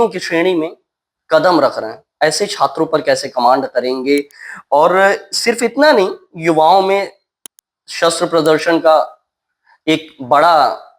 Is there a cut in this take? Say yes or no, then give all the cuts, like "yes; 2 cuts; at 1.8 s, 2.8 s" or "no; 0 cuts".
no; 0 cuts